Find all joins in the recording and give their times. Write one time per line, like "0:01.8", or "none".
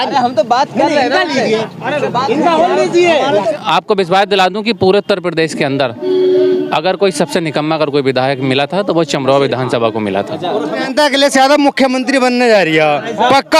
0:03.5
0:10.8

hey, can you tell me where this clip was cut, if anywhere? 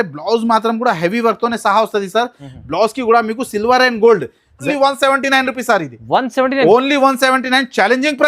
0:04.6

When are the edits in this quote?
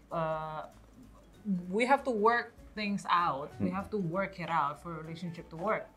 none

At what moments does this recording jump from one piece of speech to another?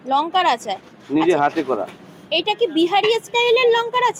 none

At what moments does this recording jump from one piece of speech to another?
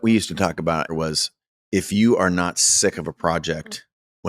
0:00.9

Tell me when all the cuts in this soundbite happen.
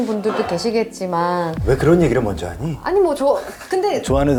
none

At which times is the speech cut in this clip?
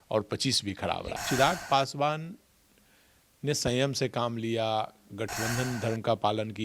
0:01.2

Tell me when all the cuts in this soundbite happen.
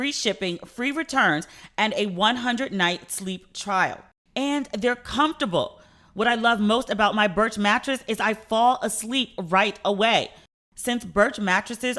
0:04.2

